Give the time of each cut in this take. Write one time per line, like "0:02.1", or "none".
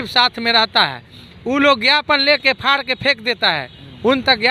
none